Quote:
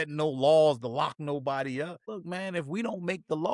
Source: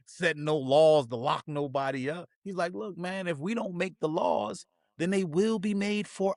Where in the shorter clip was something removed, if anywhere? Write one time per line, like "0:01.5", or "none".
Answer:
0:02.1